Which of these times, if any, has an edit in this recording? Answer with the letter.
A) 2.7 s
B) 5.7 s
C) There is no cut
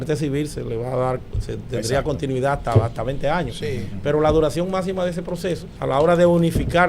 B